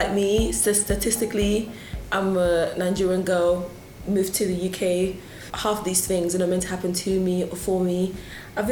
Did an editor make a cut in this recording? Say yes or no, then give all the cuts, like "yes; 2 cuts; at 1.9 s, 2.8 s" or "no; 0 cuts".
yes; 1 cut; at 5.5 s